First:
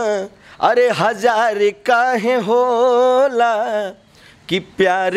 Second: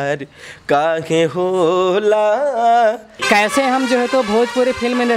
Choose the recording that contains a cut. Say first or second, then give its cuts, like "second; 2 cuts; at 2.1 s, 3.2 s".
second; 1 cut; at 3.1 s